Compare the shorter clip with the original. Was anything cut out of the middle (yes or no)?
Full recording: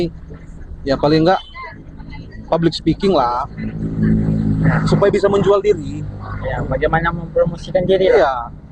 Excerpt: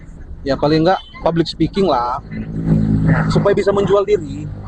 yes